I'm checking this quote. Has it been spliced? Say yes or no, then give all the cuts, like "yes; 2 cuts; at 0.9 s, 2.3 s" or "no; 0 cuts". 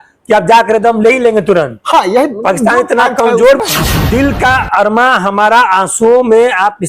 yes; 1 cut; at 3.6 s